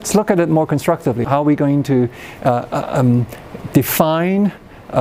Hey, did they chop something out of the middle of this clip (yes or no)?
yes